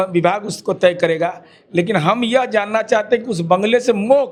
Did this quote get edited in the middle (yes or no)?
no